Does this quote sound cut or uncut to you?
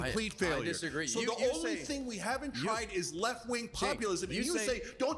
uncut